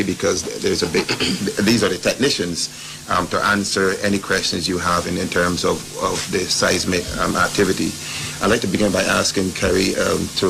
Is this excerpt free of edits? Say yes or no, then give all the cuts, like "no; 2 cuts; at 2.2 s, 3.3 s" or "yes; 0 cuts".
yes; 0 cuts